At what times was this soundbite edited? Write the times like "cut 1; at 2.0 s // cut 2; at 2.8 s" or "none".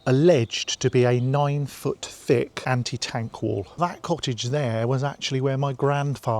cut 1; at 2.6 s // cut 2; at 3.7 s